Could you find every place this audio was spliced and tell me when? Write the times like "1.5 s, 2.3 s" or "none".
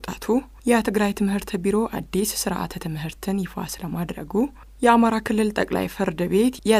none